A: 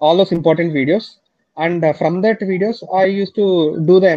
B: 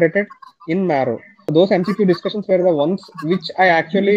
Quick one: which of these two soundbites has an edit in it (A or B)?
B